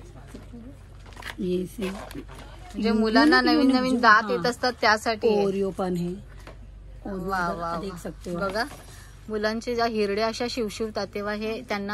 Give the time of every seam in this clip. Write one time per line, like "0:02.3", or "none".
none